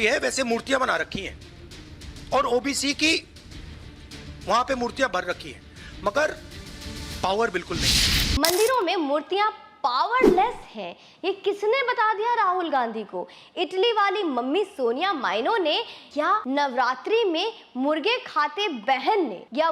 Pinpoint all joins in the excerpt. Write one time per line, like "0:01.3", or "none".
0:08.4